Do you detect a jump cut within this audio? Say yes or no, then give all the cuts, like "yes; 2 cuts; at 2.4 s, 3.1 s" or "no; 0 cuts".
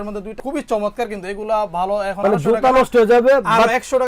yes; 1 cut; at 2.2 s